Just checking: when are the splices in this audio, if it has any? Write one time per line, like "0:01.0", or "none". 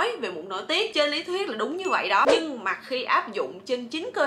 0:02.3